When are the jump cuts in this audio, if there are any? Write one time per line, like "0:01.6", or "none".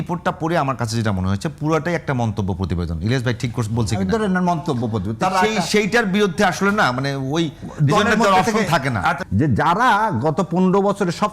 0:09.2